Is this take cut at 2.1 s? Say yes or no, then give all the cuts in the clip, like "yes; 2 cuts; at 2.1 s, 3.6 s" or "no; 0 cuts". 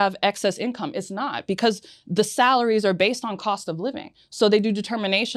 no; 0 cuts